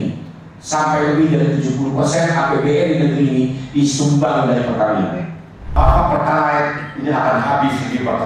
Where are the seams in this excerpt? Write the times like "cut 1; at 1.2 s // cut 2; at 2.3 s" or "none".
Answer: cut 1; at 5.6 s